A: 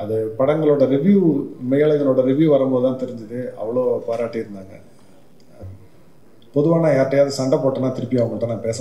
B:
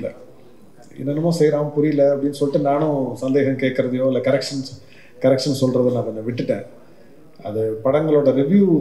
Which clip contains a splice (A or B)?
A